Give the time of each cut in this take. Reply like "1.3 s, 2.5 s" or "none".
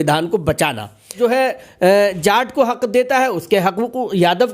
1.1 s